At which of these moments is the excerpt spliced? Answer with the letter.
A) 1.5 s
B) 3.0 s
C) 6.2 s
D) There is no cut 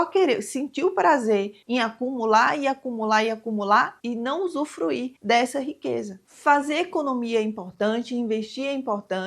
D